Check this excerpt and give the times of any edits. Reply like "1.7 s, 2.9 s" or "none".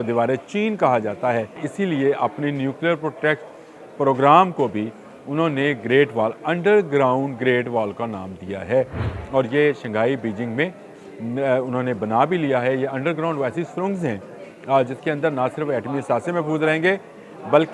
1.7 s